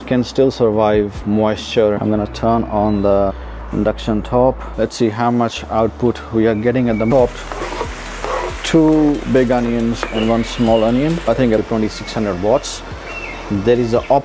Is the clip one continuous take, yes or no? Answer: no